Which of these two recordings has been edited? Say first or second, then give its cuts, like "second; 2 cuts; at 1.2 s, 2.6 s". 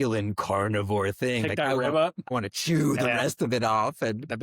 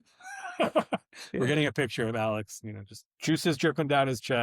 first; 1 cut; at 2.3 s